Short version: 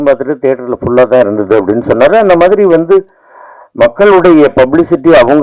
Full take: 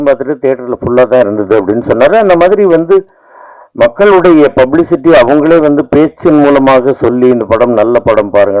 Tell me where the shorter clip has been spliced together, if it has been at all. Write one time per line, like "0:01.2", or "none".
none